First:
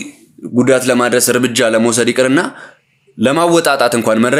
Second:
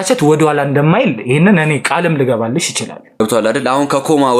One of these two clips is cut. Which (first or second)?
second